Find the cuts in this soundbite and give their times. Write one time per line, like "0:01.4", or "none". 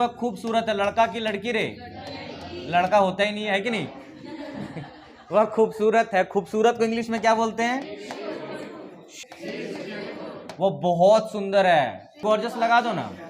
0:09.2
0:12.2